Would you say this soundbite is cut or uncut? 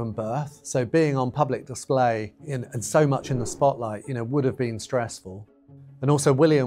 cut